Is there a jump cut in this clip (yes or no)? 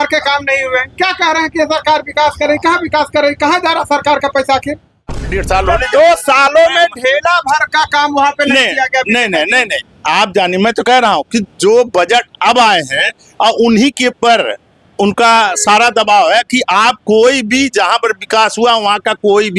yes